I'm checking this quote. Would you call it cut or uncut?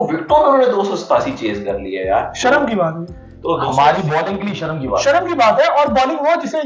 uncut